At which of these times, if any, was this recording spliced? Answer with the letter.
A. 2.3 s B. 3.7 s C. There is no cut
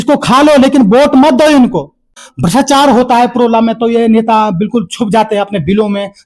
A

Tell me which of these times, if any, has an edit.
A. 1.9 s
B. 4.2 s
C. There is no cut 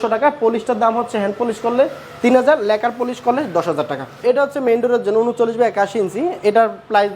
B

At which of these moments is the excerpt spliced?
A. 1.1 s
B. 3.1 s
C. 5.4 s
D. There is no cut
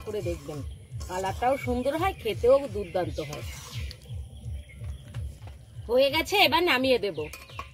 C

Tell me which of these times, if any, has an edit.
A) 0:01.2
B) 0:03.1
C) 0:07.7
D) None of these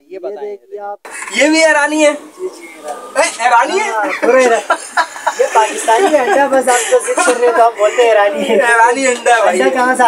A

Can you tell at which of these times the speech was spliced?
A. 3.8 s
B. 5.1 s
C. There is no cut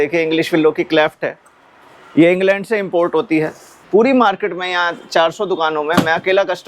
A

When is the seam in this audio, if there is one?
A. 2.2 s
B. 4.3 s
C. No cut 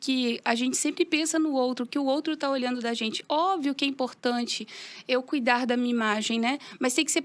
C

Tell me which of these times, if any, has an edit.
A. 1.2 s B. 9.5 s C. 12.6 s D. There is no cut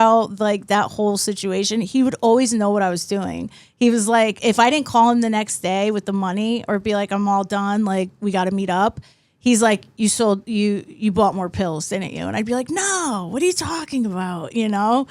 D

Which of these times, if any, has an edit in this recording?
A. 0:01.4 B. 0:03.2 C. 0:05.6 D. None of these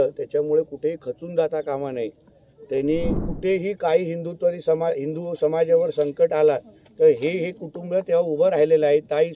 B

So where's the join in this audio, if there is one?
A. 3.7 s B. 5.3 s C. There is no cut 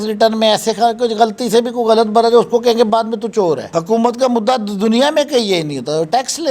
A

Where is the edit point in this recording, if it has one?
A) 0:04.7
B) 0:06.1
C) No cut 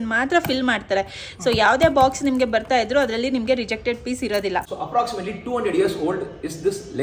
A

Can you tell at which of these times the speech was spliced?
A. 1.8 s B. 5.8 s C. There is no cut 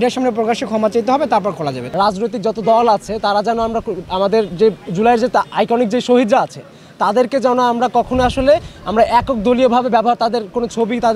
A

